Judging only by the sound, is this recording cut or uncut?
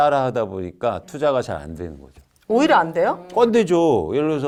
uncut